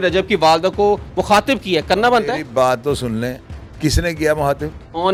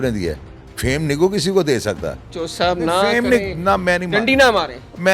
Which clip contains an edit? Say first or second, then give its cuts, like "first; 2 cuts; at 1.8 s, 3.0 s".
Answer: second; 1 cut; at 2.4 s